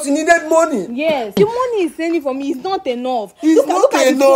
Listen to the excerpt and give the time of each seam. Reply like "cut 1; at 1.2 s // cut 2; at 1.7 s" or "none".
cut 1; at 1.4 s